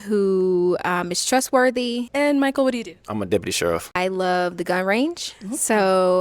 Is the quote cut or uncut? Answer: cut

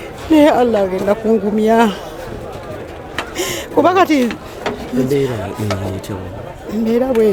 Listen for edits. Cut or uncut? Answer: uncut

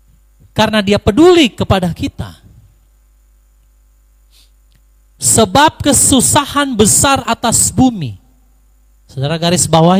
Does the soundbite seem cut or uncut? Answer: uncut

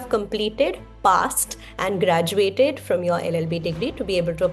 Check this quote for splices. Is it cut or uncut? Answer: uncut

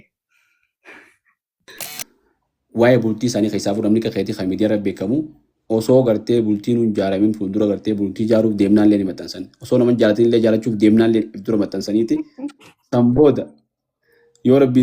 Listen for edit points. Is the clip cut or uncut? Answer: cut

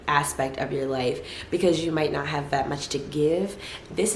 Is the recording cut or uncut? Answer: uncut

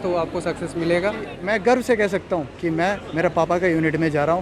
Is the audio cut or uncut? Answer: cut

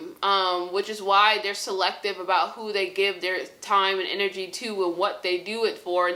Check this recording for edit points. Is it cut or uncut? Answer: uncut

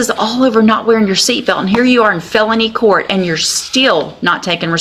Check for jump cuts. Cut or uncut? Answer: uncut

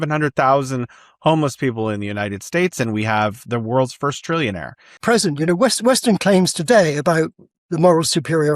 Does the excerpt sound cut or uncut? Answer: cut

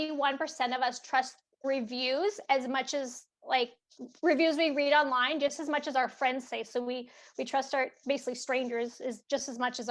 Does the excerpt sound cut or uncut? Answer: uncut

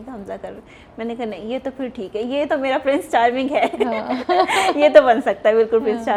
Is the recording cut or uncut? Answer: uncut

